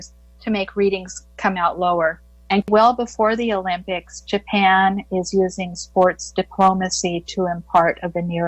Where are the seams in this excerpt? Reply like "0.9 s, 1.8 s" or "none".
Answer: 2.7 s